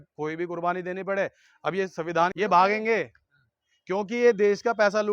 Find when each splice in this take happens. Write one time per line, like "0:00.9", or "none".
0:02.3